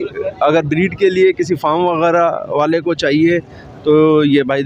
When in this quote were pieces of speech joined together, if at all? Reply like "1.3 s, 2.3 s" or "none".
none